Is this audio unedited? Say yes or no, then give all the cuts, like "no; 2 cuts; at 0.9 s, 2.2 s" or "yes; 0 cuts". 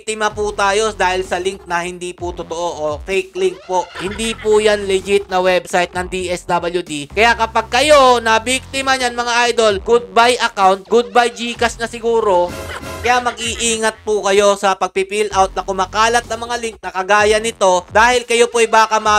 no; 3 cuts; at 3.9 s, 12.9 s, 17.9 s